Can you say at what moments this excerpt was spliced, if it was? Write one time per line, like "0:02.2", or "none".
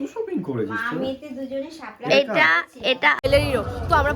0:03.2